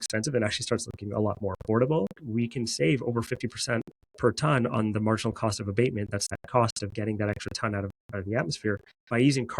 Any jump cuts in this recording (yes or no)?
yes